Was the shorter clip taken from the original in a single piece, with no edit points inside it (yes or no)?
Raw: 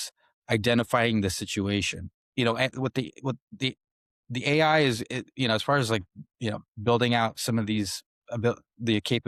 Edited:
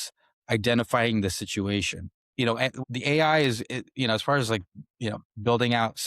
no